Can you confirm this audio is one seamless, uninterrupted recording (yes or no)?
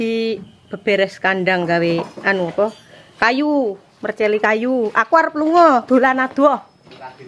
yes